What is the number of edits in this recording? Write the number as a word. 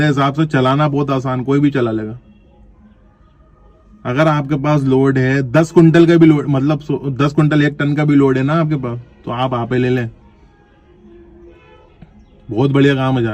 zero